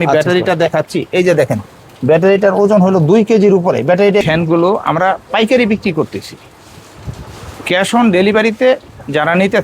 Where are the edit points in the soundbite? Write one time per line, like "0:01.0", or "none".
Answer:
0:04.2

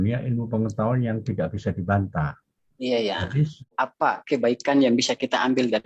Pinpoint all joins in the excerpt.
0:03.7

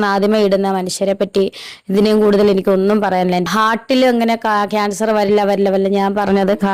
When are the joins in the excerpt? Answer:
0:01.2
0:03.5

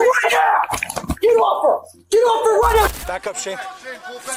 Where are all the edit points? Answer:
0:02.9

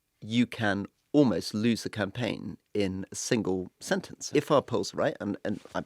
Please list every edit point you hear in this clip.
0:04.3

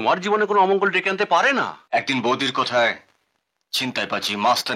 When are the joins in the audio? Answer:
0:01.8

